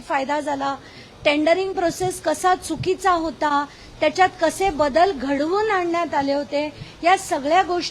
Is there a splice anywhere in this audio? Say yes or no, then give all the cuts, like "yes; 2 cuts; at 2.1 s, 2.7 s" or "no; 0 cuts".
no; 0 cuts